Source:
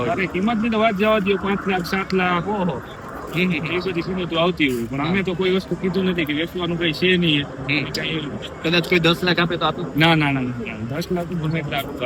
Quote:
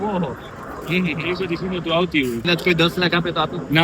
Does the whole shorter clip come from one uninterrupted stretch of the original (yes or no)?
no